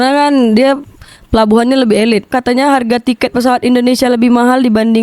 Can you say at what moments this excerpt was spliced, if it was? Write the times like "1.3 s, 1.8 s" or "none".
2.3 s

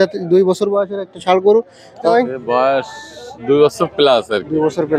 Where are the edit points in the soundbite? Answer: 2.0 s

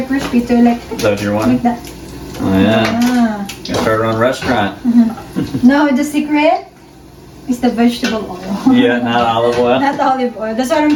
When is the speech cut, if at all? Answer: none

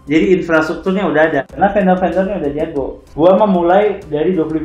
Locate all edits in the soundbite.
1.6 s, 3.0 s

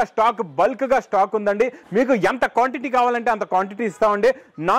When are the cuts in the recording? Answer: none

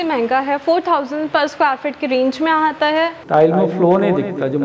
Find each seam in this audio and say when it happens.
3.2 s

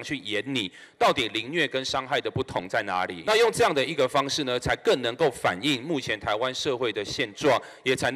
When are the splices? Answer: 3.2 s

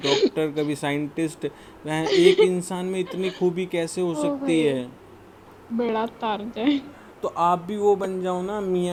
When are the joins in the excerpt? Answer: none

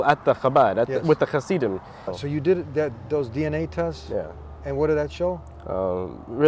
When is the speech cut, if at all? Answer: 2.2 s

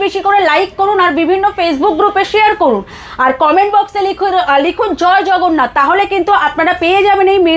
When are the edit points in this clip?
none

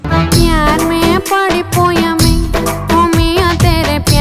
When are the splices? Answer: none

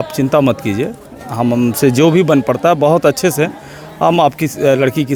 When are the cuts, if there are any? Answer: none

